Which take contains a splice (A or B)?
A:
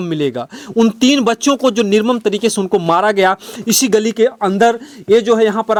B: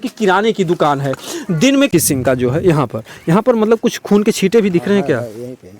B